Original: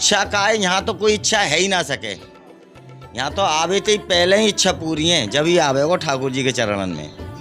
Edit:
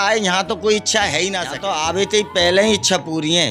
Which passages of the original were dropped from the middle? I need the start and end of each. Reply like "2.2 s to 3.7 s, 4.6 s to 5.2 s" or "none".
1.9 s to 3.2 s

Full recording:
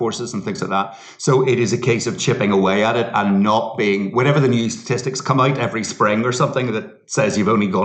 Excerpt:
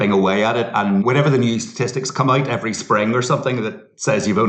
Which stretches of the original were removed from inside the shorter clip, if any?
3.4 s to 4.1 s

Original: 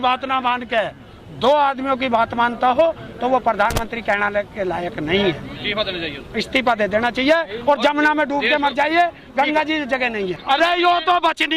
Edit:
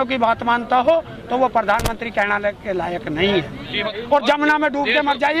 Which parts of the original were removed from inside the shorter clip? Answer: 5.9 s to 7.5 s

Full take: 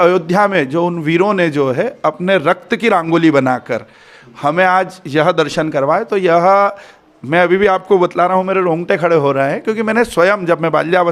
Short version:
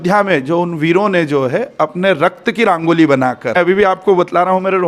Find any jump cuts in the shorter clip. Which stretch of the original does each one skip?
3.8 s to 7.4 s

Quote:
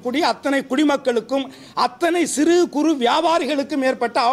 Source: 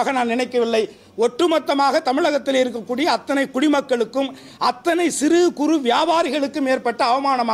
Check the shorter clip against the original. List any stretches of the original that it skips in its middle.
none

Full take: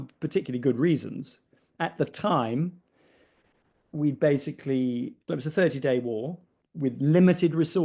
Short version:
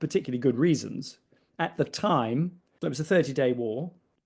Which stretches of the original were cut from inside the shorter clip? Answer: 2.9 s to 5.2 s

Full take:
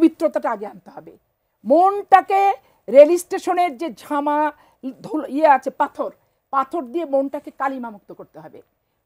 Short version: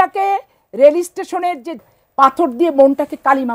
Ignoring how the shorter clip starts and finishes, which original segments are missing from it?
4.1 s to 6.3 s

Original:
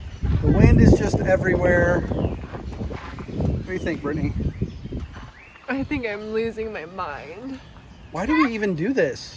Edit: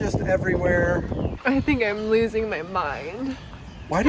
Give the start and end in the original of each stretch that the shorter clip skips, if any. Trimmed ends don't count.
2.3 s to 5.6 s

